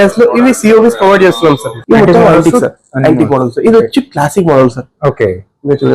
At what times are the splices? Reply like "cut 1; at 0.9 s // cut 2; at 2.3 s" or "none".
cut 1; at 1.7 s

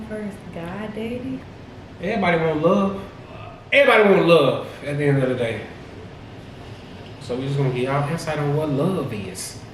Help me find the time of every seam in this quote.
cut 1; at 1.5 s // cut 2; at 3.5 s

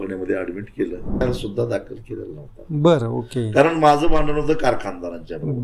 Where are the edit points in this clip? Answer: cut 1; at 1.2 s

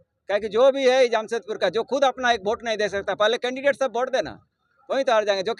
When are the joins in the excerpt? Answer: none

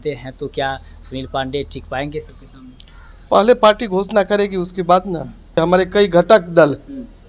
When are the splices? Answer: cut 1; at 5.6 s

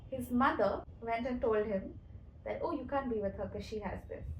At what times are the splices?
cut 1; at 0.9 s

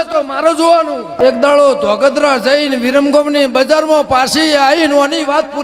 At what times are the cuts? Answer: cut 1; at 1.2 s

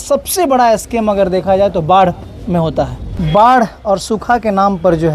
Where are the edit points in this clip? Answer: cut 1; at 3.0 s

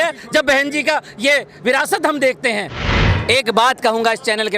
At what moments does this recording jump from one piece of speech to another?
cut 1; at 2.9 s

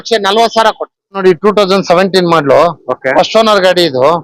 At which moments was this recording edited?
cut 1; at 1.2 s

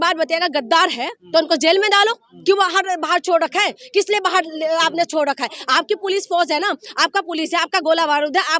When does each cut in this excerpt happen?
none

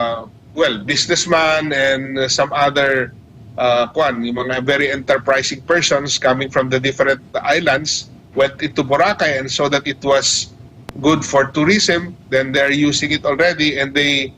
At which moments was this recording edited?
none

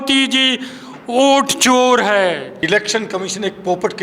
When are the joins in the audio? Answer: cut 1; at 2.5 s

